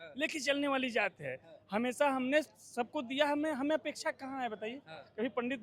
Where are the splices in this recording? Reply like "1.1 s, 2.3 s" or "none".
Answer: none